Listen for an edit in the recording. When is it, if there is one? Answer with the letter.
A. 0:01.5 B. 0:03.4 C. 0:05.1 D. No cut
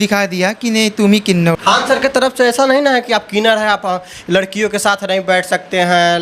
A